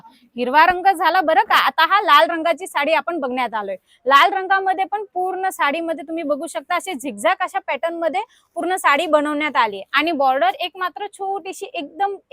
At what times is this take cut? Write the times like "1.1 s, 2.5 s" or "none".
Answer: none